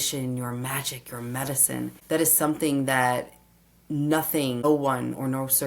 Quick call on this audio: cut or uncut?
cut